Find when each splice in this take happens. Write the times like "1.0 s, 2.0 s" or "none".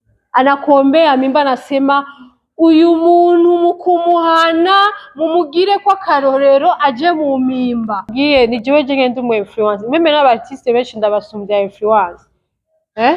8.2 s